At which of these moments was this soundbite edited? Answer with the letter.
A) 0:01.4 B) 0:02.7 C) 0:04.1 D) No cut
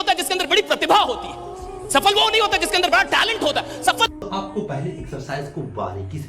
C